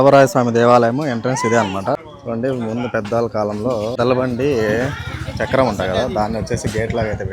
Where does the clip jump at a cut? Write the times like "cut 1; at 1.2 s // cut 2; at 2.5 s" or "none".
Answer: cut 1; at 2.0 s // cut 2; at 3.9 s